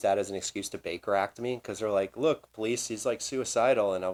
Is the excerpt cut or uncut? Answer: uncut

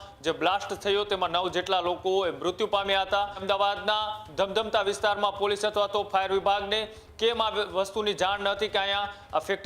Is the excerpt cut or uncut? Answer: cut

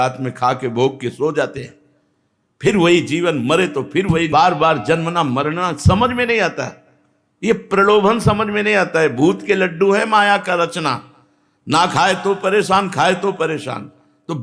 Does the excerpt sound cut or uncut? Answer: uncut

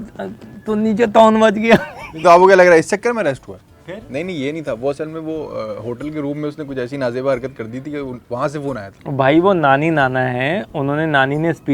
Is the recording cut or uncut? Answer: uncut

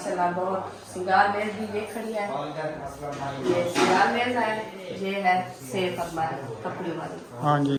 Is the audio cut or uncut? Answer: uncut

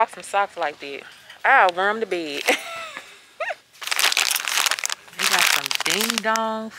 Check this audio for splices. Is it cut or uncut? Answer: cut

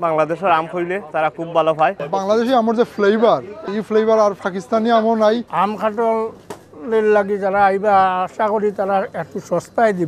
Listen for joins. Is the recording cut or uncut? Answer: cut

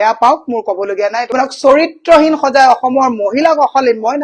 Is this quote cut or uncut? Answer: cut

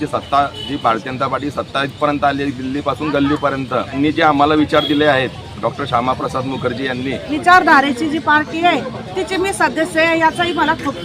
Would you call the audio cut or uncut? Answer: cut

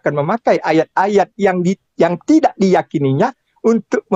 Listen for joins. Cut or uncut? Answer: uncut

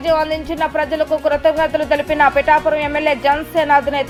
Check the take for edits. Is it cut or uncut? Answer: uncut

